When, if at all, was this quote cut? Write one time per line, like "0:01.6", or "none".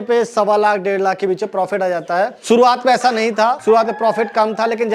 0:02.4
0:03.6